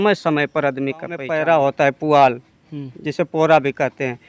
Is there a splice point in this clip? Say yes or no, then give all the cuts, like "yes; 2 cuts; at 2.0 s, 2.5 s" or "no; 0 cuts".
yes; 1 cut; at 1.3 s